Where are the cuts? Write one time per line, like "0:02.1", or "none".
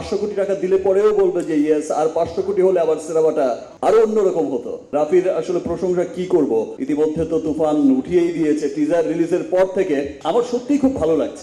none